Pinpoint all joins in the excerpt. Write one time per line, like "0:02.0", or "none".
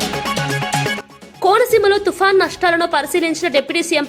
none